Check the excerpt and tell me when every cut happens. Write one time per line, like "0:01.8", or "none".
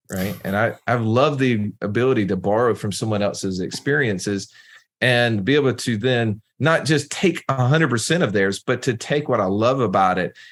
none

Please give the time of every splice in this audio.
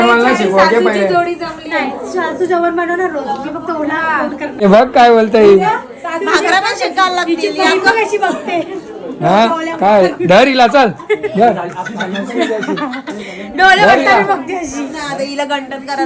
0:04.6

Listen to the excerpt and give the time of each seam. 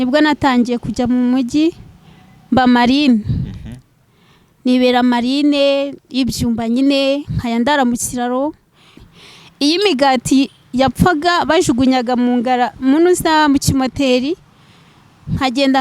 0:09.2

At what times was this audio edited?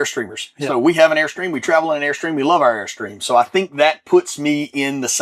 none

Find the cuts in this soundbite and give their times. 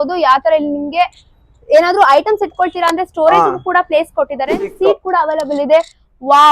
0:04.7

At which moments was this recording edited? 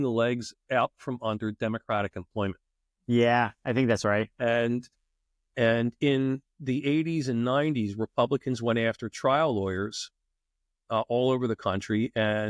none

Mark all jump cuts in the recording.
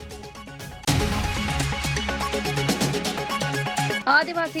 0:00.8
0:02.2
0:03.6

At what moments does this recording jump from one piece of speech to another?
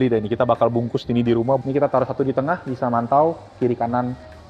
0:01.6

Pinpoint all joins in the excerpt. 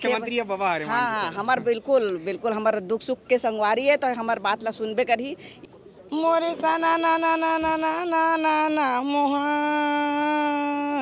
0:05.5

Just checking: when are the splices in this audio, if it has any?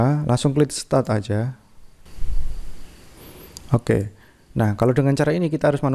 0:02.0

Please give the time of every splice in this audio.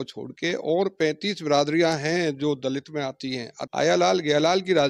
0:03.6

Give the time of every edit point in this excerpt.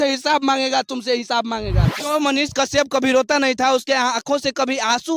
0:01.9

